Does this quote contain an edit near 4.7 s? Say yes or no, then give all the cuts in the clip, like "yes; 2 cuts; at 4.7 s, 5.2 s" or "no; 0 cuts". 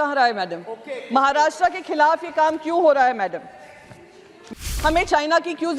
yes; 1 cut; at 4.7 s